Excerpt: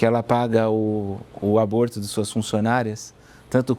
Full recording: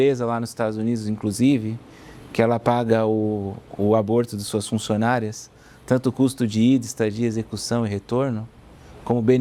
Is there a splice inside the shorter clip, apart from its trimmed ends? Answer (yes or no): no